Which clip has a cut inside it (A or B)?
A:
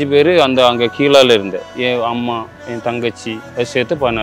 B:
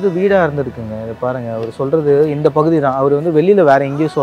A